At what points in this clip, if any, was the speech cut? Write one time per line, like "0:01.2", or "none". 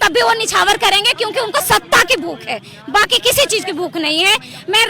none